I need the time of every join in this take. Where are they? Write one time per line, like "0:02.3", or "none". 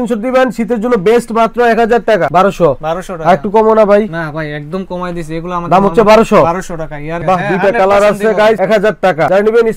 0:02.3
0:07.1

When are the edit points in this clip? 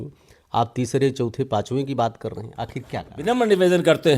0:03.1

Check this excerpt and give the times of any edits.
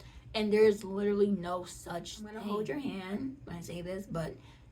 0:02.4

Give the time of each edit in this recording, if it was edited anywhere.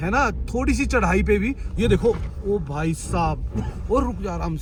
none

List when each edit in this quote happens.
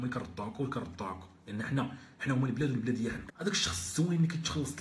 0:03.3

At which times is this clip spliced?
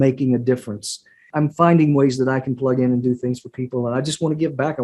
0:01.3

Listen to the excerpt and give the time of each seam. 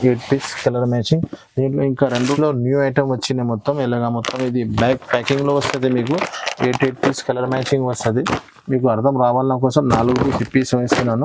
0:02.4

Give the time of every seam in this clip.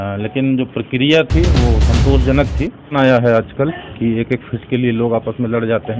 0:02.9

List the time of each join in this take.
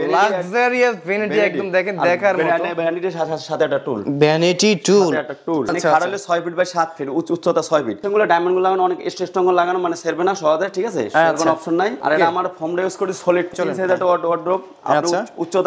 0:05.7
0:08.0
0:12.0
0:13.5

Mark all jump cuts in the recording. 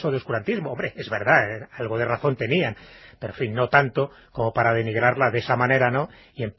0:05.6

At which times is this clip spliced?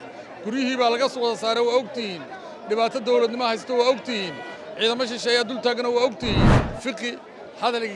0:06.6

